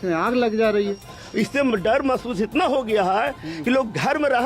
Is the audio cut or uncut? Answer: cut